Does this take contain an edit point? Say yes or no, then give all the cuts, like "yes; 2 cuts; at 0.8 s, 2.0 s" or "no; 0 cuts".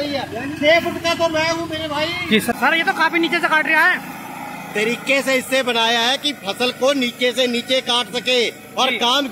yes; 1 cut; at 2.6 s